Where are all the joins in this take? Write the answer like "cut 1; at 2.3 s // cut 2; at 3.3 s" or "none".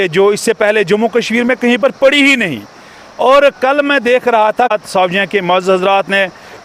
cut 1; at 4.7 s